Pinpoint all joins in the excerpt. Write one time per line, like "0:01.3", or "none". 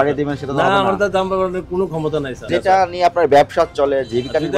0:02.5